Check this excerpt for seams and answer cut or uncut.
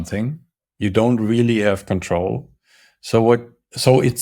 uncut